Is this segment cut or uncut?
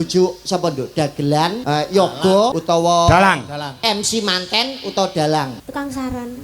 cut